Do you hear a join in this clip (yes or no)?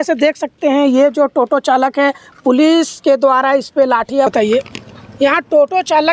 yes